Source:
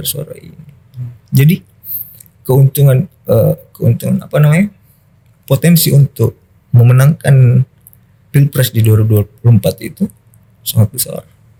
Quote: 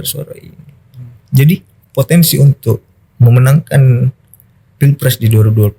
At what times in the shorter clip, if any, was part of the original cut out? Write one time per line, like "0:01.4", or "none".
0:01.8

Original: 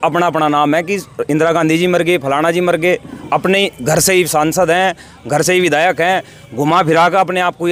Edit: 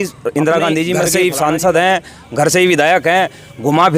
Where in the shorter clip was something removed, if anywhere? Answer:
0:01.1

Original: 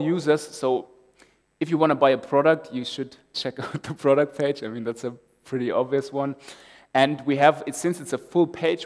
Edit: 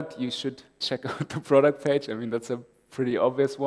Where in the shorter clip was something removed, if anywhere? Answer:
none

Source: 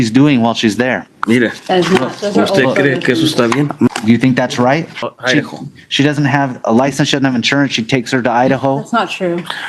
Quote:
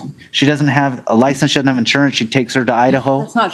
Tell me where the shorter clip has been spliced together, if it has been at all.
none

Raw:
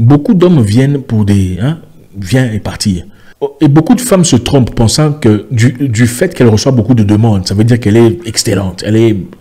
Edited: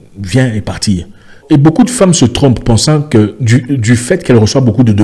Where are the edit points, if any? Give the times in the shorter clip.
0:01.4

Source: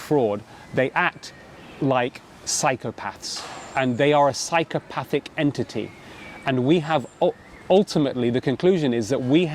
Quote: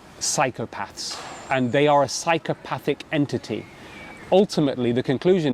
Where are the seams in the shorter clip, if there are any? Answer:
0:04.1

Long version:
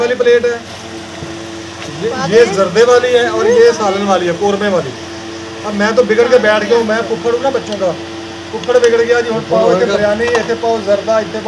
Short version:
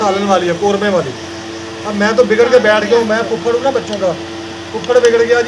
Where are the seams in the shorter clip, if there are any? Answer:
none

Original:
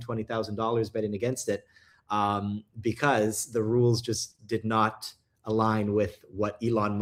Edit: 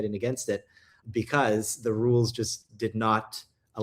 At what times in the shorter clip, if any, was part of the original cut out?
0:01.0

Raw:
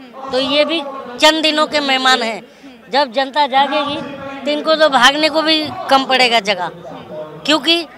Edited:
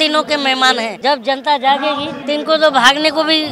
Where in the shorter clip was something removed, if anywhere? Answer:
0:00.9
0:02.1

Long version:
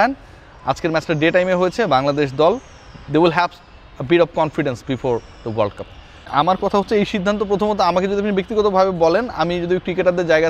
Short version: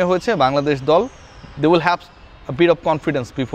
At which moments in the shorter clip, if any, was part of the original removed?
none

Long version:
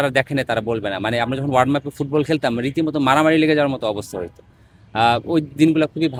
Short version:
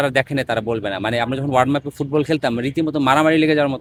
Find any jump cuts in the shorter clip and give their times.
none

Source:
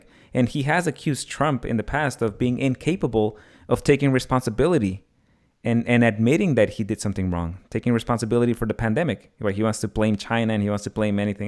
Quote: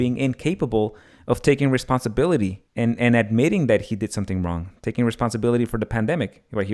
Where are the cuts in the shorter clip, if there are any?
0:02.6

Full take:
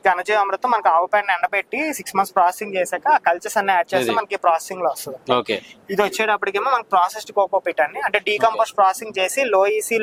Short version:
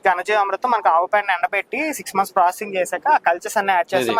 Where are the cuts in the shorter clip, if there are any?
none

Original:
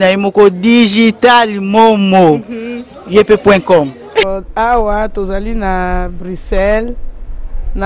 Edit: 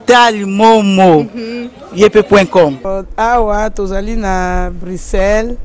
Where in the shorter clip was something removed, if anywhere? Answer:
0:02.9

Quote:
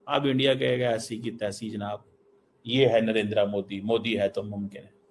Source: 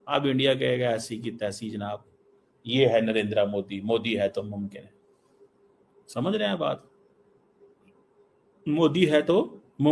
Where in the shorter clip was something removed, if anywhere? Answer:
none

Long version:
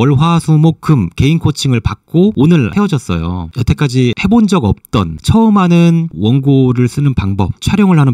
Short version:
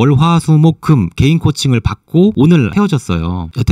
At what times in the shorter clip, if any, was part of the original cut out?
none

